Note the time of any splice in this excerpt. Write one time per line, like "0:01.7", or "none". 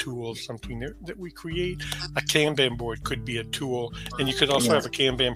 none